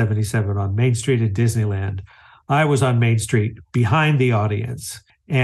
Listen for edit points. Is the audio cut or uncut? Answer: uncut